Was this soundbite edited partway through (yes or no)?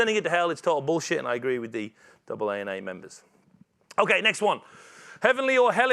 no